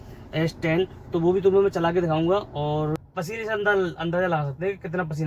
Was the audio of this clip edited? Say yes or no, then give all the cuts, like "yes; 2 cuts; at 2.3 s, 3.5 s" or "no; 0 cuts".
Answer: yes; 1 cut; at 3.0 s